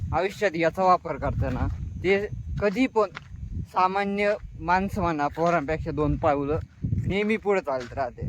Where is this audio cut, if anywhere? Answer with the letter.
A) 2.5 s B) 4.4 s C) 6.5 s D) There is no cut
D